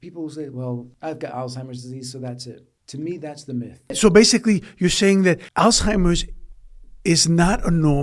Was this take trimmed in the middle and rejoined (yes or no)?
yes